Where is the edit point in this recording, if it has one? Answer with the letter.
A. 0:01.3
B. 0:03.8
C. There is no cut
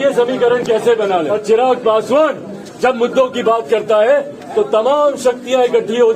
A